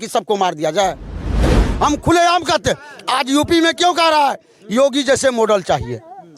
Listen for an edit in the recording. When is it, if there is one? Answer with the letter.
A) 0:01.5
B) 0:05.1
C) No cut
A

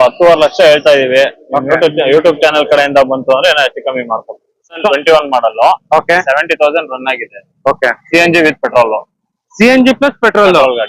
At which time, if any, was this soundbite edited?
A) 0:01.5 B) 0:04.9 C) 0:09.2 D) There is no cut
B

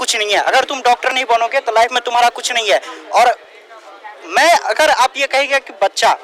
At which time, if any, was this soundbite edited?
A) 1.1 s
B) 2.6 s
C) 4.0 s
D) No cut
D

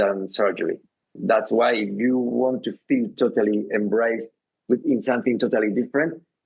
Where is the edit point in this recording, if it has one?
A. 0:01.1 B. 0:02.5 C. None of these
A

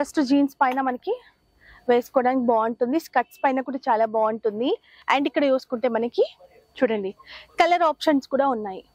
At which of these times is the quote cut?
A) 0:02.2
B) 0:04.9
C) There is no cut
B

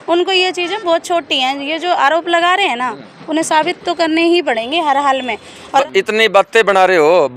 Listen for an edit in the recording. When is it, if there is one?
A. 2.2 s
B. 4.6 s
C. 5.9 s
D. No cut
C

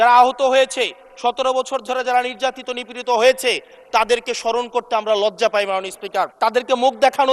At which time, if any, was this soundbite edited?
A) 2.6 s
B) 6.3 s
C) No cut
B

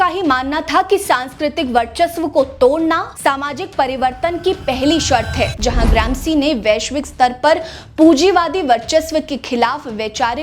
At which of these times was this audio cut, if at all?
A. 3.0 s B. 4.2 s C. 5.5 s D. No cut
C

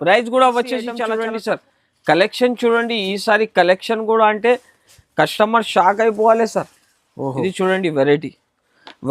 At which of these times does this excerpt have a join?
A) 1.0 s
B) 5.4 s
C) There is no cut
A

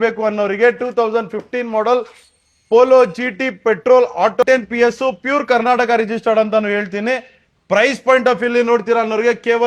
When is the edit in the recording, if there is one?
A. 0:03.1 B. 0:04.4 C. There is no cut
B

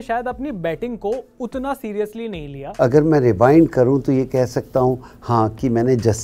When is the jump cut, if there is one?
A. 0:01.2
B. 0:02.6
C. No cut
B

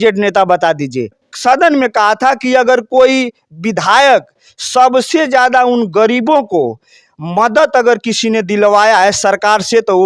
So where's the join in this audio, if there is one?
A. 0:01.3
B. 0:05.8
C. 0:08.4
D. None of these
A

